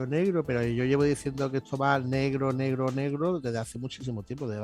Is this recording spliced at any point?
no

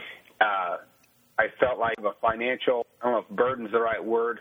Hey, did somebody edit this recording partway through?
yes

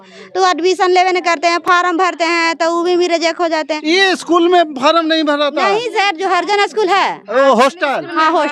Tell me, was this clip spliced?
no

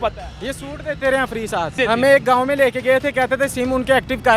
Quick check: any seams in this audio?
yes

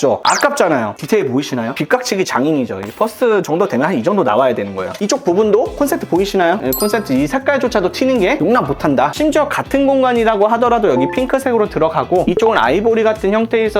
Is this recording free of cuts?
no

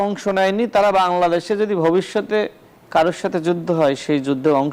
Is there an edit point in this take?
no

